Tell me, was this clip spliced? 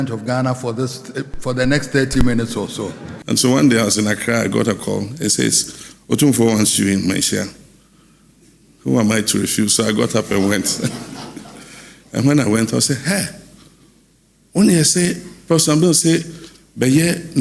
yes; 1 cut; at 3.1 s

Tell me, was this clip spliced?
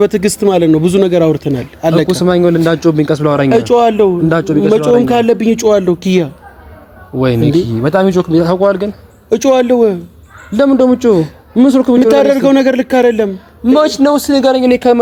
no; 0 cuts

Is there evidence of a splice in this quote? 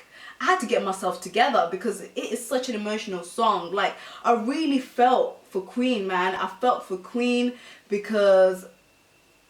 no; 0 cuts

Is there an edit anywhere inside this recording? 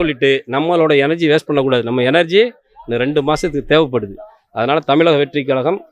no; 0 cuts

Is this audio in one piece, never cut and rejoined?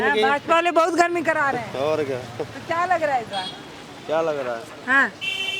yes; 0 cuts

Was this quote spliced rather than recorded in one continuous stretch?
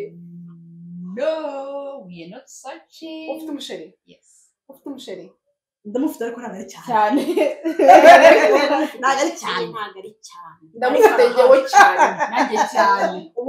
no; 0 cuts

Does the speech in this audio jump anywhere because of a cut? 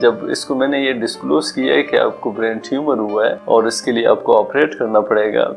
yes; 1 cut; at 3.4 s

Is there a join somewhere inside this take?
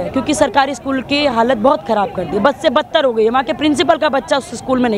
no; 0 cuts

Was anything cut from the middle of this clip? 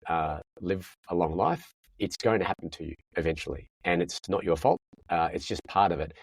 no; 0 cuts

